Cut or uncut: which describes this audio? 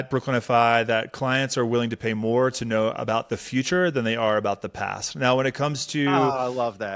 uncut